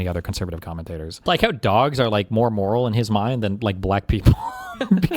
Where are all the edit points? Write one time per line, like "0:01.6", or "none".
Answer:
0:01.2